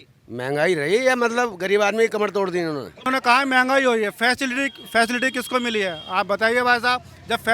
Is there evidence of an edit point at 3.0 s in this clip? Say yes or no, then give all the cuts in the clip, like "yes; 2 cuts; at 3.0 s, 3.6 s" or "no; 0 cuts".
yes; 1 cut; at 3.0 s